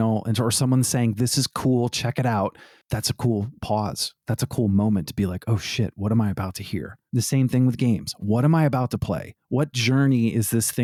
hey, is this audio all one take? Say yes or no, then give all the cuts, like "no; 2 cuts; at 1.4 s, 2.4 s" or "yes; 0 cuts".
yes; 0 cuts